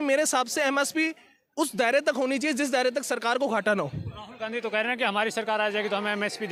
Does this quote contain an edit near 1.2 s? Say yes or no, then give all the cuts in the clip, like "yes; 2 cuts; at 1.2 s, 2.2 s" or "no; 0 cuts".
no; 0 cuts